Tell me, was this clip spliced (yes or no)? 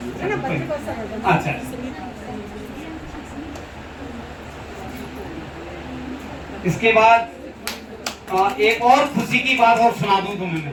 no